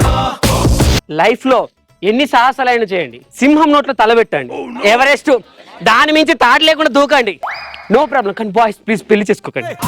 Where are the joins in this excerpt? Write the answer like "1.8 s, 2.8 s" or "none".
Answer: 1.0 s